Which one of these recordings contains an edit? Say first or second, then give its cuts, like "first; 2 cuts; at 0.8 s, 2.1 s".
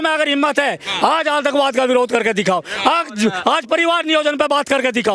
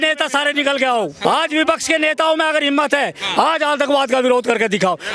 second; 1 cut; at 1.2 s